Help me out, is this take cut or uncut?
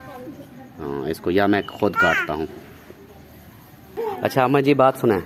uncut